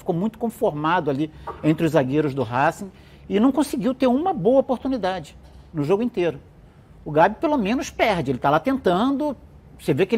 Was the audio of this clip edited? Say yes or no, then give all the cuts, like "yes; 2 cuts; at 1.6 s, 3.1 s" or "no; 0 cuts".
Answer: no; 0 cuts